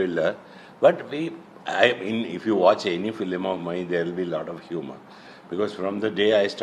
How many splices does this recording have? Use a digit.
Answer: 0